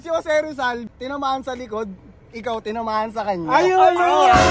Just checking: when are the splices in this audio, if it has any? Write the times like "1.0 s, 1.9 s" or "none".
0.9 s